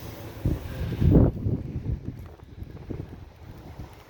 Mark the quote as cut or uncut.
uncut